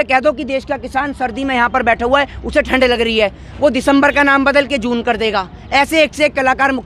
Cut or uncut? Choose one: uncut